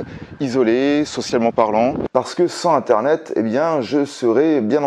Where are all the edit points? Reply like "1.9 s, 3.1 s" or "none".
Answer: 2.1 s

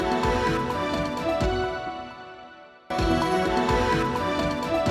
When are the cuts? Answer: 2.9 s

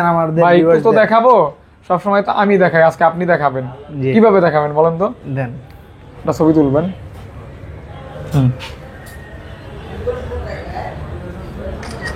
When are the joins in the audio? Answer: none

